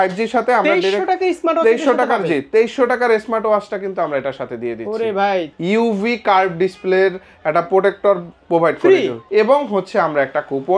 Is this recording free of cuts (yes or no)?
no